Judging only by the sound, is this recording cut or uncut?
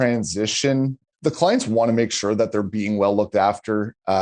cut